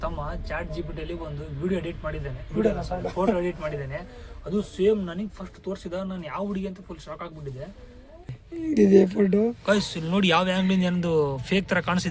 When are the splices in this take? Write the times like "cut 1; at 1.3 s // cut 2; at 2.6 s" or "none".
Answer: cut 1; at 8.3 s